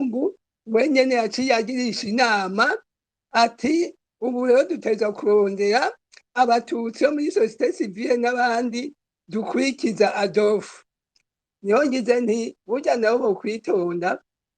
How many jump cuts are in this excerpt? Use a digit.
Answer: 1